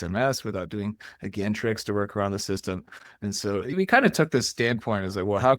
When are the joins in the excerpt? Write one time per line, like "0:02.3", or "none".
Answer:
0:03.7

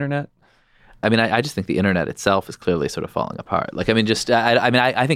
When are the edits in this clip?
0:01.0

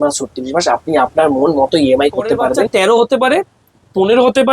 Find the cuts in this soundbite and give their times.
0:02.7

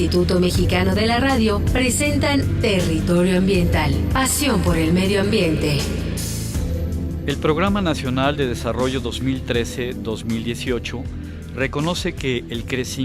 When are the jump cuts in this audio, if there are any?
0:04.0

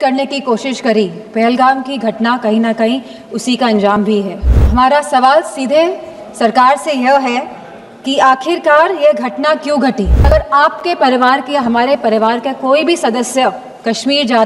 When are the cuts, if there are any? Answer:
0:04.5
0:10.3

